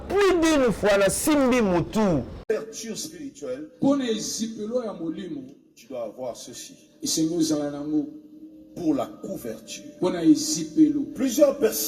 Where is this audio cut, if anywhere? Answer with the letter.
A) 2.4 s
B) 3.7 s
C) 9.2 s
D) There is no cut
A